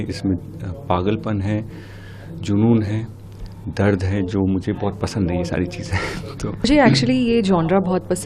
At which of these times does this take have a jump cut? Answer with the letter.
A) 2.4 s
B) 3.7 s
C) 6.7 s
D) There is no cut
C